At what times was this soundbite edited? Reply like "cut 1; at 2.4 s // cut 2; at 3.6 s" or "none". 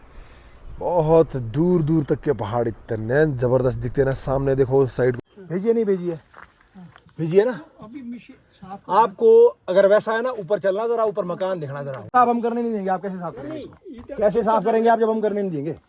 cut 1; at 5.2 s // cut 2; at 12.1 s